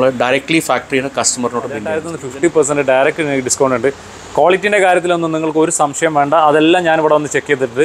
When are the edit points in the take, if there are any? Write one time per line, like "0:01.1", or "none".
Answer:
0:02.1

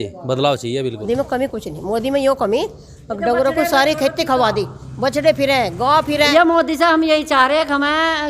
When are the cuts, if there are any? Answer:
0:01.3
0:06.3

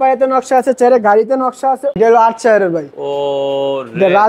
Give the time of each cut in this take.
0:02.0

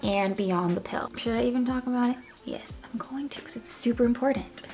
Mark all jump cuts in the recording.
0:01.0

